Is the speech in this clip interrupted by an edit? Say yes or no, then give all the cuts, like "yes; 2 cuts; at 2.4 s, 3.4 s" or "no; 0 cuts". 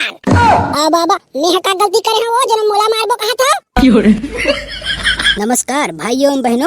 yes; 1 cut; at 3.6 s